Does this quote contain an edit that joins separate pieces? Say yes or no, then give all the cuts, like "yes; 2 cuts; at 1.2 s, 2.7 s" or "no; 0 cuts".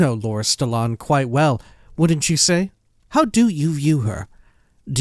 no; 0 cuts